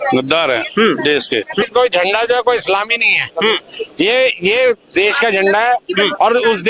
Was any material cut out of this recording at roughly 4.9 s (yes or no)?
no